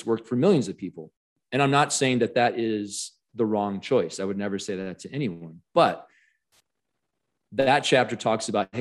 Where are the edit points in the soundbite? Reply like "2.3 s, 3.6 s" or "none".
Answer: 1.4 s

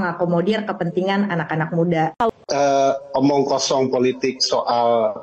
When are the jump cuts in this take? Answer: 2.3 s

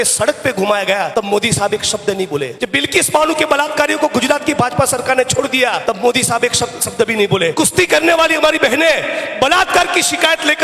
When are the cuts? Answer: 1.1 s, 2.6 s, 5.8 s, 7.5 s

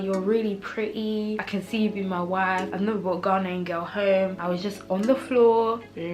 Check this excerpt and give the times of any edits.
1.4 s, 2.7 s, 4.4 s

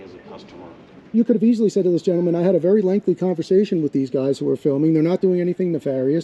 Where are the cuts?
1.1 s

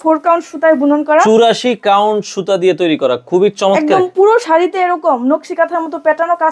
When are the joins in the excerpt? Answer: none

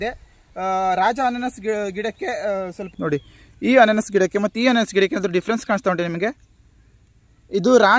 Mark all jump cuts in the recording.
2.8 s

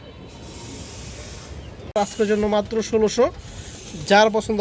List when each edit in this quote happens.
2.0 s

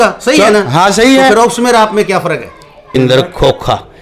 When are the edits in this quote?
2.9 s

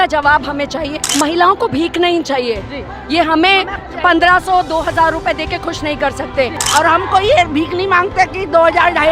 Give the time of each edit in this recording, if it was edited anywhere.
1.0 s, 6.6 s

